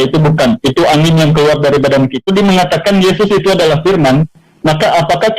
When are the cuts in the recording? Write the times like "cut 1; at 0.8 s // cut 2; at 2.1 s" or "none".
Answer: cut 1; at 2.2 s